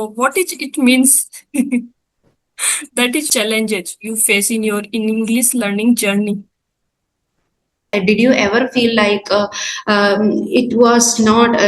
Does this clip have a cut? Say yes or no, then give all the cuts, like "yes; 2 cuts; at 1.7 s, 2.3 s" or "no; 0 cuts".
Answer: yes; 2 cuts; at 3.2 s, 7.9 s